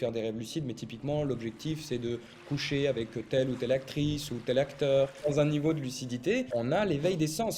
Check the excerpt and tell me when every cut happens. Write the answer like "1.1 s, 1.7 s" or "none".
5.2 s, 6.5 s